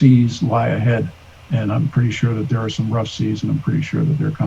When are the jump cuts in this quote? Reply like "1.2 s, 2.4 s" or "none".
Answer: none